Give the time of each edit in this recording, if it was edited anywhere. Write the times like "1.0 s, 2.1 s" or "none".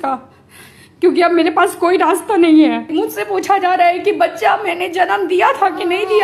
2.9 s